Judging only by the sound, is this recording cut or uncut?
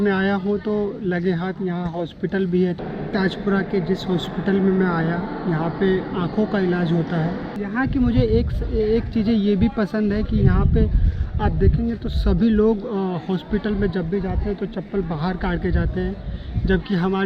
cut